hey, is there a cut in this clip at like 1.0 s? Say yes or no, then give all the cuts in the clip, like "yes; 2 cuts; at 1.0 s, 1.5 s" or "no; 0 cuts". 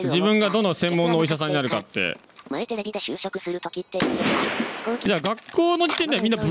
no; 2 cuts; at 2.3 s, 5.1 s